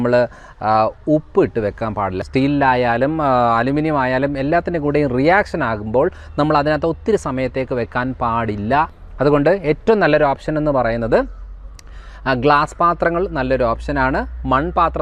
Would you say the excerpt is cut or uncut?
cut